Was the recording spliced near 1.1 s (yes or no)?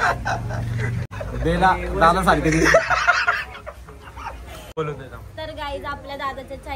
yes